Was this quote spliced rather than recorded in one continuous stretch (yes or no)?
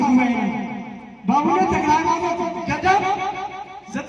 no